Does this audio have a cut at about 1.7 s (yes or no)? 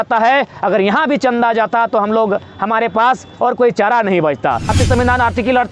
no